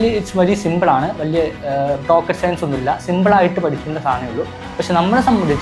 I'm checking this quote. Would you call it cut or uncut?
uncut